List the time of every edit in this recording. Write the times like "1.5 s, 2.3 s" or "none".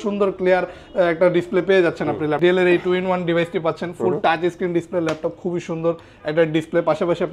2.4 s